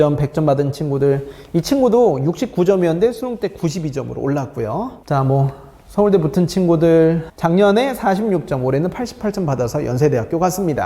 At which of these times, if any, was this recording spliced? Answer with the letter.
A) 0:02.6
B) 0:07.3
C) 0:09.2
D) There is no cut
B